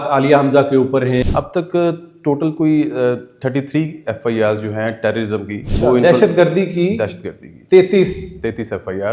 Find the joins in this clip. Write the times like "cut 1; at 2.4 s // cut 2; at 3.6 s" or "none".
cut 1; at 1.2 s // cut 2; at 5.6 s